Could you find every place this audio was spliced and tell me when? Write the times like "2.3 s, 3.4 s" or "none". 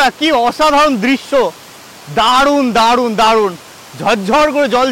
none

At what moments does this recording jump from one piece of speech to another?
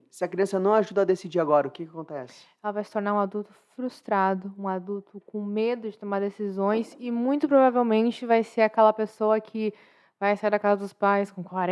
none

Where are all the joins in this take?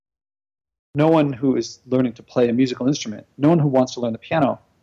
0.9 s

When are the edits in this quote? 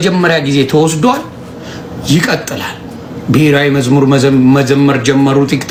none

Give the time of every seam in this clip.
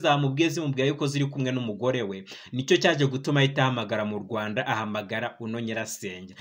none

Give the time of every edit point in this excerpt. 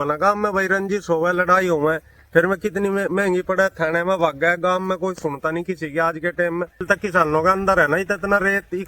6.8 s

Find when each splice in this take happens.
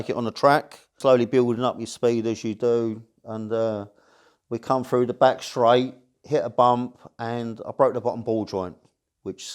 0.9 s

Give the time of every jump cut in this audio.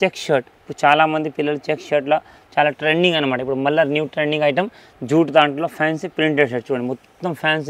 4.8 s

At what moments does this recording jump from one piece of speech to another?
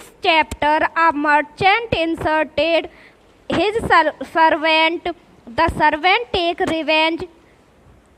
none

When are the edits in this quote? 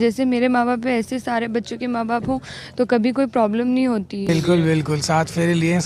4.3 s

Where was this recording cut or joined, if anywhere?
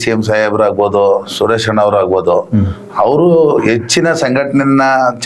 none

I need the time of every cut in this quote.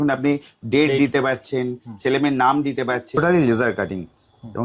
3.2 s

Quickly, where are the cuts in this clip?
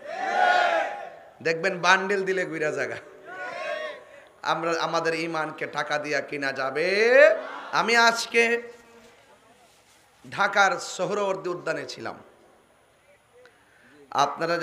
7.6 s

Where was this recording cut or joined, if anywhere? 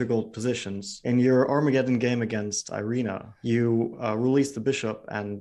3.3 s

